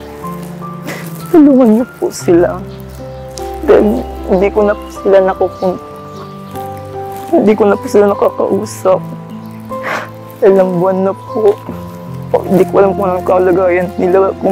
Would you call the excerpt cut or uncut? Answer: cut